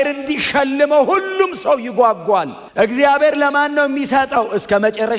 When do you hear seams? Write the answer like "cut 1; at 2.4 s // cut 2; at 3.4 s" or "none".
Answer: cut 1; at 2.6 s